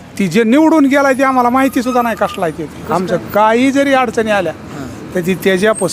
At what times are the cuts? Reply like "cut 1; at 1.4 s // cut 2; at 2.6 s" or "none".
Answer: none